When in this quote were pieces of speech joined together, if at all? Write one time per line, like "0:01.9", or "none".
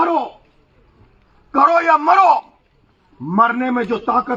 none